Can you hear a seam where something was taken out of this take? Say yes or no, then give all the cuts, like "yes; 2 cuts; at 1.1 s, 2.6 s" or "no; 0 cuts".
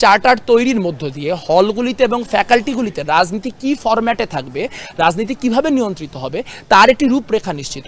no; 0 cuts